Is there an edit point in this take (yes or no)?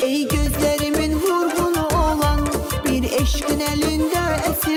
no